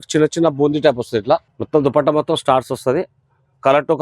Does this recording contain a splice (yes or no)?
yes